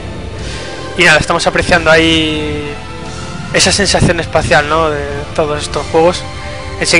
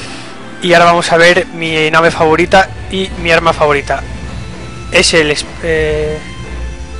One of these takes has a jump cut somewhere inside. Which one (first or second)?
second